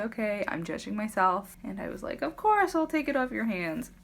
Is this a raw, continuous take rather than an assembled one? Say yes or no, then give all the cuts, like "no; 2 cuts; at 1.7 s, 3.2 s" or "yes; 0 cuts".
no; 1 cut; at 1.5 s